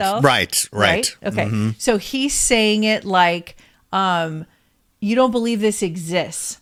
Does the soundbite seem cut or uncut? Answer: uncut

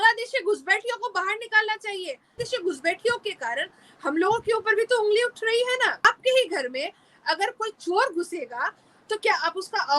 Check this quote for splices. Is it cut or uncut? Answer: cut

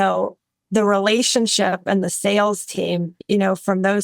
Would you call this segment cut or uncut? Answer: uncut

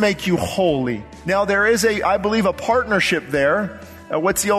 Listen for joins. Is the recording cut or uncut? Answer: cut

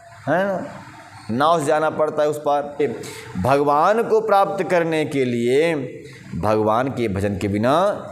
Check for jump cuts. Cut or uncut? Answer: cut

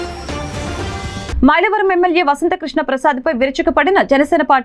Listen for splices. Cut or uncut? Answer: uncut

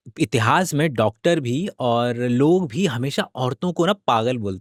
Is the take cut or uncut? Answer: uncut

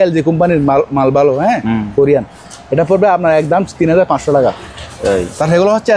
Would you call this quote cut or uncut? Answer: uncut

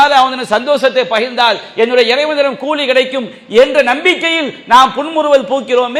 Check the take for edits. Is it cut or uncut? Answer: uncut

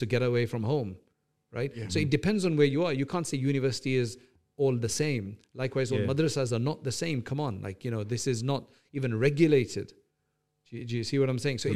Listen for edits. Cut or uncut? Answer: uncut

